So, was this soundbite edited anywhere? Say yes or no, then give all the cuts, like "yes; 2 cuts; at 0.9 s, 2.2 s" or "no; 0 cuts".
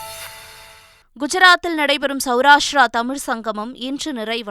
yes; 1 cut; at 0.9 s